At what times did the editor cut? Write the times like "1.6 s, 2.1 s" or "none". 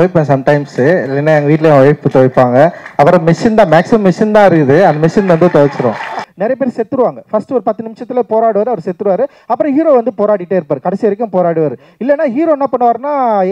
6.2 s